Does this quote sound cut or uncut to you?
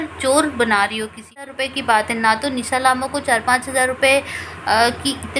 cut